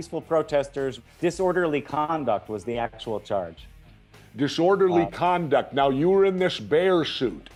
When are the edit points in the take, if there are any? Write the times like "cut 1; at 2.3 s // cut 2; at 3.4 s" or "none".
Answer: none